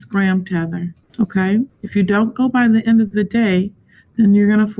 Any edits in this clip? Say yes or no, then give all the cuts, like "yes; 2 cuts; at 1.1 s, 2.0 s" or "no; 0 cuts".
yes; 2 cuts; at 1.0 s, 1.8 s